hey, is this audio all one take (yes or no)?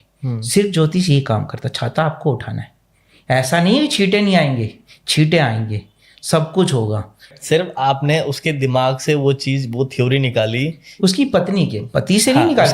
no